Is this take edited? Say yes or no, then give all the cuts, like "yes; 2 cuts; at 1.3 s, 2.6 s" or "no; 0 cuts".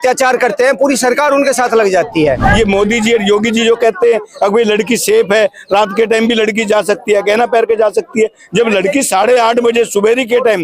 yes; 1 cut; at 2.4 s